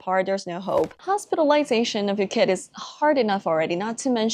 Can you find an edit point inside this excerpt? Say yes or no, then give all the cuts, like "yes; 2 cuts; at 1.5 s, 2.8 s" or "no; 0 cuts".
yes; 1 cut; at 1.0 s